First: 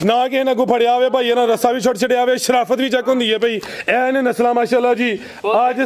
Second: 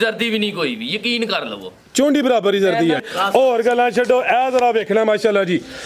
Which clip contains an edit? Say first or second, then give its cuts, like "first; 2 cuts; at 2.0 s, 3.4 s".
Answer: second; 1 cut; at 3.0 s